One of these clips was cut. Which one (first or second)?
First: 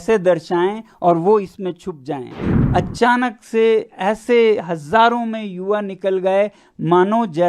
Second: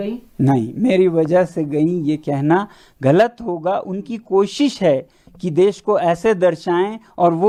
first